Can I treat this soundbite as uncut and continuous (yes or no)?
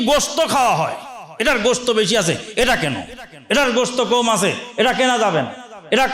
yes